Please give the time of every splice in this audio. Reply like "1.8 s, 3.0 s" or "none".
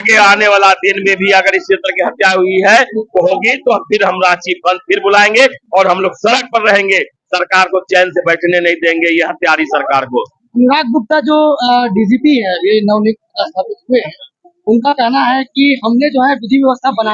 none